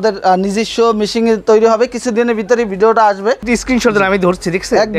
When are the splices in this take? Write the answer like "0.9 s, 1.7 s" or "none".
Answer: 3.4 s